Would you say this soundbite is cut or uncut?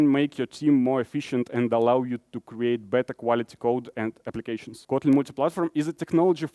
cut